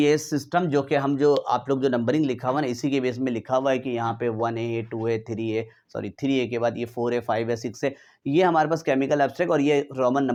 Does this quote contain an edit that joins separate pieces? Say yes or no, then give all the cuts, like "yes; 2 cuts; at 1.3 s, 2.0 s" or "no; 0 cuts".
no; 0 cuts